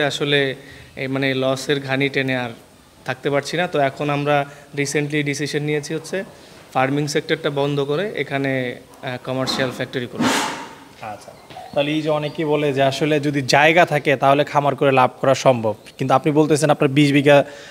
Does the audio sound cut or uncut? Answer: uncut